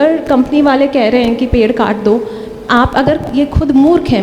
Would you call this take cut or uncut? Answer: uncut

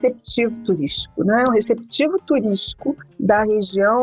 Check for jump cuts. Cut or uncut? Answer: cut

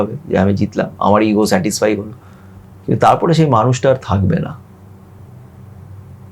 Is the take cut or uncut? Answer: uncut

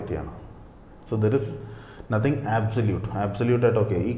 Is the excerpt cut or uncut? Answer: uncut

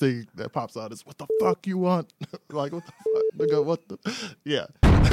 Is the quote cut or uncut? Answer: uncut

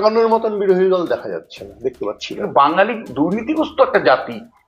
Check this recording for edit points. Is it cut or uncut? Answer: cut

